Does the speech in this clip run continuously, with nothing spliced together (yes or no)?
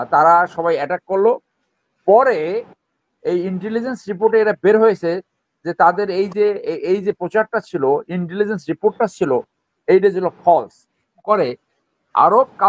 no